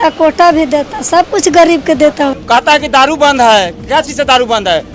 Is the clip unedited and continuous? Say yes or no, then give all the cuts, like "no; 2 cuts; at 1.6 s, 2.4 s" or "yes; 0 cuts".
no; 1 cut; at 2.4 s